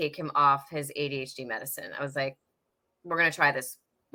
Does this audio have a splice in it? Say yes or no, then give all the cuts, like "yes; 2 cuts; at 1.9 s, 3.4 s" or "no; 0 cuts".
no; 0 cuts